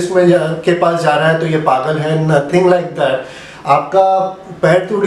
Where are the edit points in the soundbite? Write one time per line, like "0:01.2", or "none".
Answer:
none